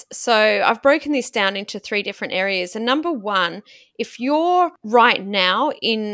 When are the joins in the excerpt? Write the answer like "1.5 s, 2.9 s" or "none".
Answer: 4.8 s